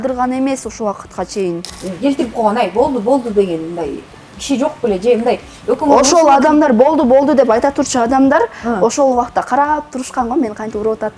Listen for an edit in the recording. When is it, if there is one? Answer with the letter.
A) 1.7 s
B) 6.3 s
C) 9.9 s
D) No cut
A